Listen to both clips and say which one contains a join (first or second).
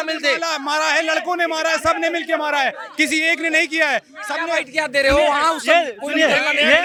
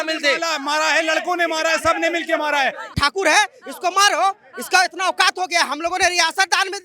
second